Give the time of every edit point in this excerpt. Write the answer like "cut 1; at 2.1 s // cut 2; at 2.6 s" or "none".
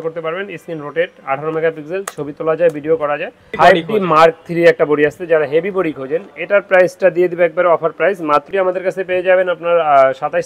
cut 1; at 3.5 s // cut 2; at 8.5 s